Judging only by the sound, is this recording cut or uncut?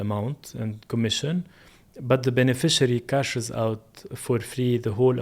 uncut